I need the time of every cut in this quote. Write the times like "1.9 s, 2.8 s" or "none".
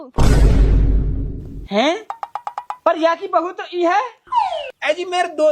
none